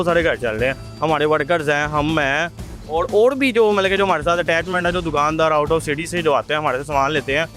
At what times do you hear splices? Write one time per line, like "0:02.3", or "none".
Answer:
none